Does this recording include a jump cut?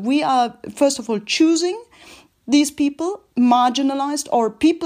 no; 0 cuts

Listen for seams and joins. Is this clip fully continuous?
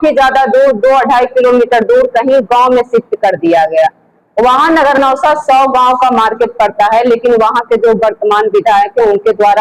yes; 0 cuts

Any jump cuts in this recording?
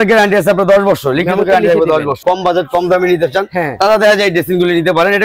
yes; 1 cut; at 2.2 s

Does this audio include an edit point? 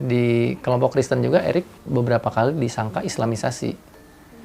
yes; 1 cut; at 1.8 s

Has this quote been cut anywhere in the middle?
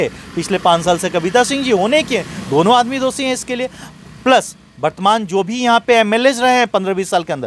no; 0 cuts

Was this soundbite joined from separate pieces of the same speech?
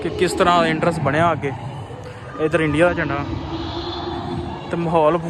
no; 0 cuts

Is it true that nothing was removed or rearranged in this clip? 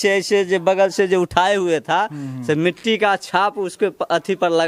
yes; 0 cuts

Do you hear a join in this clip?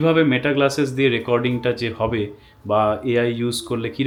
no; 0 cuts

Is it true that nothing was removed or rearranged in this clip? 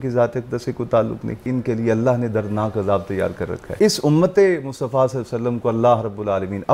no; 2 cuts; at 1.4 s, 3.7 s

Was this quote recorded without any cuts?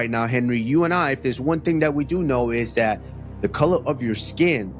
yes; 0 cuts

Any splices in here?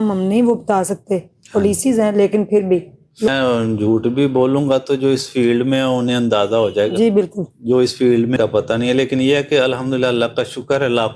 yes; 1 cut; at 3.3 s

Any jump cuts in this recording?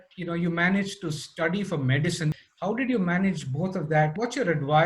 yes; 2 cuts; at 2.4 s, 4.1 s

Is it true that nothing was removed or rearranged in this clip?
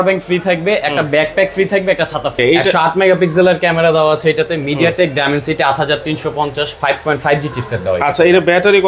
no; 1 cut; at 2.3 s

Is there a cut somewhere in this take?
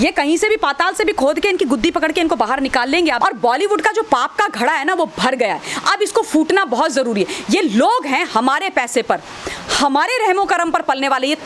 yes; 1 cut; at 3.2 s

